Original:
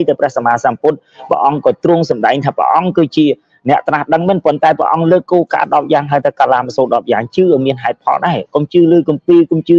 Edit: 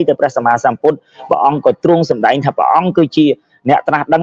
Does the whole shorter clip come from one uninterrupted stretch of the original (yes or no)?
yes